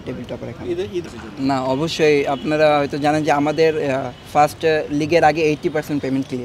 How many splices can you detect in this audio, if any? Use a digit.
1